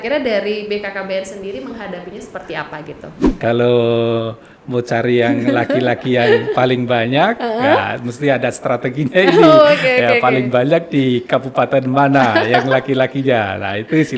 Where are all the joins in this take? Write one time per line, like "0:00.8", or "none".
0:03.2

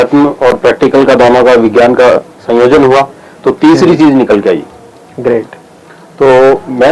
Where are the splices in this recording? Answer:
none

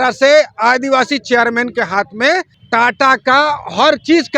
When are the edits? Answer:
0:02.6

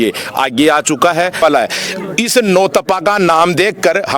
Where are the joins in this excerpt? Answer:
0:01.4

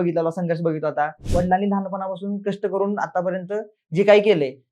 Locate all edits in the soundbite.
0:01.2

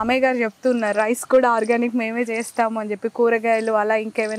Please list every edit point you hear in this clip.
none

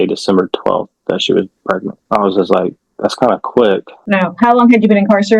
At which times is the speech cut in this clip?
0:01.9
0:03.9

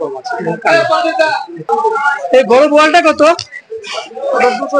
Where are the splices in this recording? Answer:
0:01.6

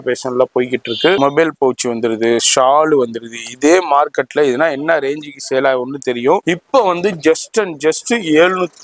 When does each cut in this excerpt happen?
0:01.2
0:06.4

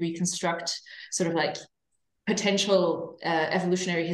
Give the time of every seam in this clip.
none

